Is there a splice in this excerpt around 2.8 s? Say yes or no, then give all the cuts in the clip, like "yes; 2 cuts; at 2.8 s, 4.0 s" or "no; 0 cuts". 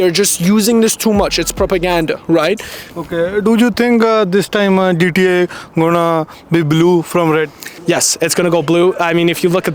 yes; 2 cuts; at 2.8 s, 7.7 s